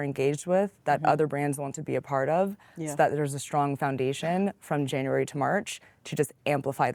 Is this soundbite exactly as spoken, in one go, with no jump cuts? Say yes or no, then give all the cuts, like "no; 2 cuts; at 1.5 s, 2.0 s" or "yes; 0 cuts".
yes; 0 cuts